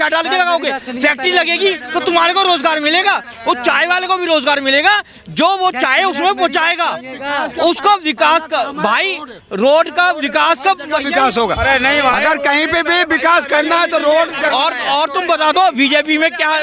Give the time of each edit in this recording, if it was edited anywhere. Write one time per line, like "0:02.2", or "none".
none